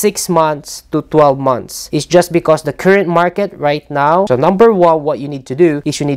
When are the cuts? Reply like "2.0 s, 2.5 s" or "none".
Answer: 4.3 s